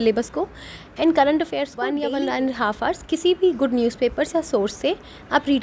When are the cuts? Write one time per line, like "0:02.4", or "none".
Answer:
0:01.9